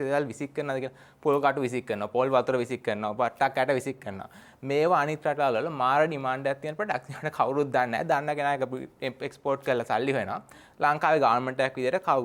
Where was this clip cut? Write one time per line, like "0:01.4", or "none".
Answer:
none